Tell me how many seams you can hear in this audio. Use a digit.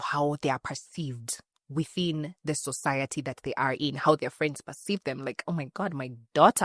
0